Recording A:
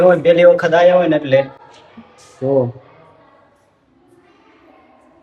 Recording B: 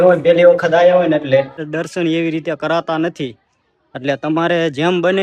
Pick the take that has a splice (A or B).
B